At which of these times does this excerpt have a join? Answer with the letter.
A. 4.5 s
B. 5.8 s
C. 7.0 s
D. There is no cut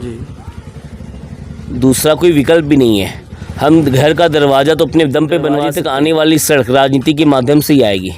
B